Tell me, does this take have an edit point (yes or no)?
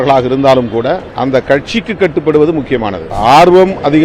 yes